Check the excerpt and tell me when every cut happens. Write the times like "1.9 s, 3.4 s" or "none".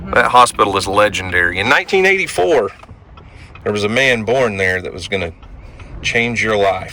none

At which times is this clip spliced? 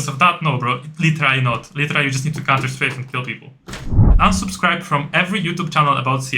4.1 s

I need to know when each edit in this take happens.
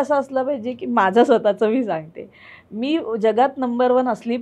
none

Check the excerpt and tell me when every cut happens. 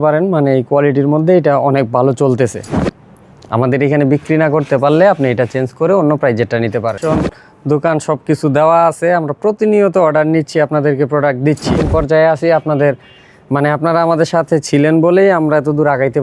2.7 s, 7.0 s, 11.8 s

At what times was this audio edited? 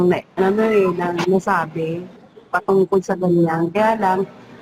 none

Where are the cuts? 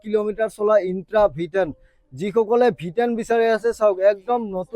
none

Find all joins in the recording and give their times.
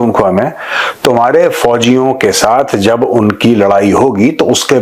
none

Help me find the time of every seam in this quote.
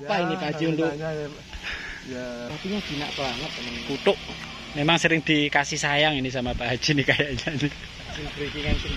2.5 s

